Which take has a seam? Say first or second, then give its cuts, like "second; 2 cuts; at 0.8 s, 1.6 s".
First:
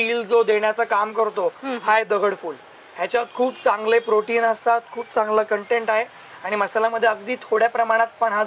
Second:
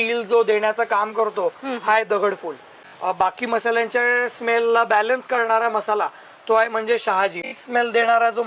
second; 2 cuts; at 2.8 s, 7.5 s